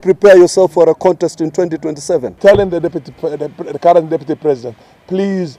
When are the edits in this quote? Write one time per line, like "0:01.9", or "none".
0:02.4